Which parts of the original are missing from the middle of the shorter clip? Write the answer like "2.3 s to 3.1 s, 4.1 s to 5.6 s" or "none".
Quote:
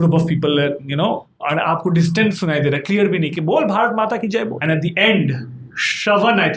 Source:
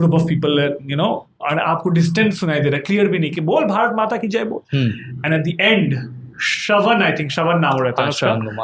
4.6 s to 5.2 s